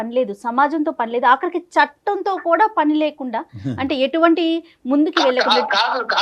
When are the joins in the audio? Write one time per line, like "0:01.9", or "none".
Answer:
none